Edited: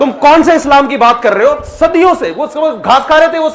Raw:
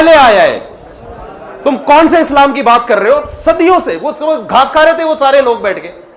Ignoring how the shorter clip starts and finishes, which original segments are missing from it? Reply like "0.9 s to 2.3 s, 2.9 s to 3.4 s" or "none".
none